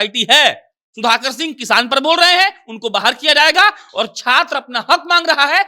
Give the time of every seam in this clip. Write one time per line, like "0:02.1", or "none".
none